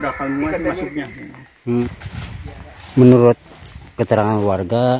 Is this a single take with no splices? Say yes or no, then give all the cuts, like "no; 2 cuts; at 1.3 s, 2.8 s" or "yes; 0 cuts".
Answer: no; 1 cut; at 1.8 s